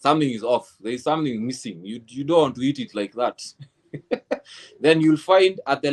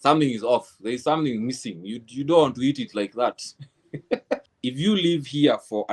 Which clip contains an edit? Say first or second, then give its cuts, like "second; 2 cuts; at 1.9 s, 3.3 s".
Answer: second; 1 cut; at 4.5 s